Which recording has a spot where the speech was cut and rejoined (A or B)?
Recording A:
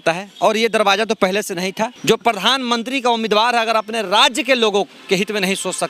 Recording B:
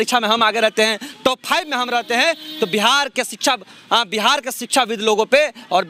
A